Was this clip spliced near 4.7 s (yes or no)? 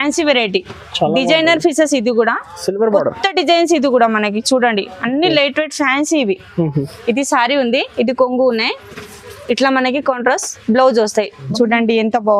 no